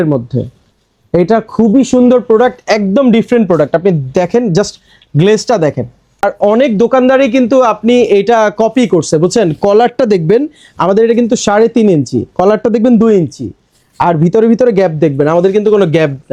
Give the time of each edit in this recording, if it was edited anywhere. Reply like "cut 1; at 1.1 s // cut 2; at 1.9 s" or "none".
none